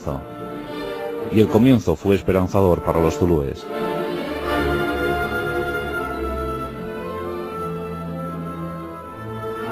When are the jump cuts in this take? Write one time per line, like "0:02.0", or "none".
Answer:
none